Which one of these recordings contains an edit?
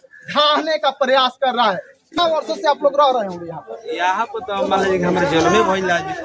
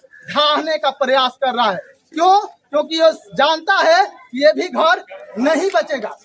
first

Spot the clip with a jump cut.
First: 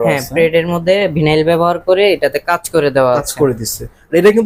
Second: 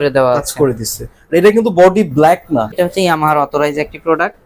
second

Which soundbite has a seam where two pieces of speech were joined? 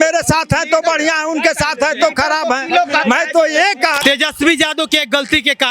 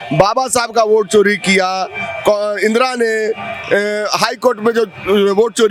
first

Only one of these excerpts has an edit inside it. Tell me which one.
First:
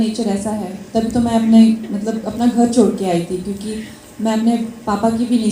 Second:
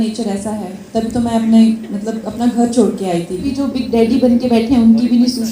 second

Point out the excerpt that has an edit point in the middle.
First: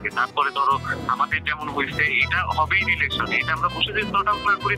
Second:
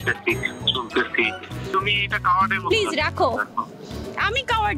second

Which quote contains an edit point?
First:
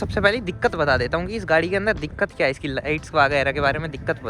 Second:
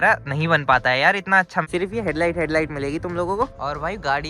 second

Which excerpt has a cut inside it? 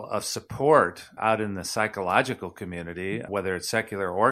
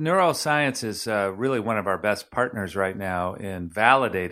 first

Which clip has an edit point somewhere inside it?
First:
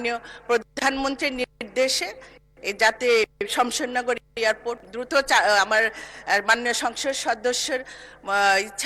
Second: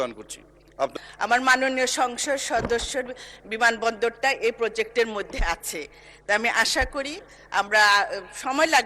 second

